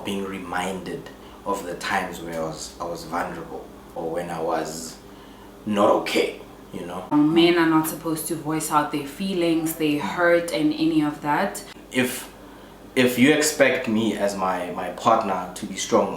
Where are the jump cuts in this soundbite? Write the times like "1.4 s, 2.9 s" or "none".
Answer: 4.0 s, 7.1 s, 11.7 s